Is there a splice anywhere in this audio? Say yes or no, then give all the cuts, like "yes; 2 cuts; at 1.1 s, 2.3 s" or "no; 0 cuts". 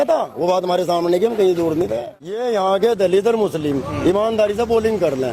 yes; 1 cut; at 2.4 s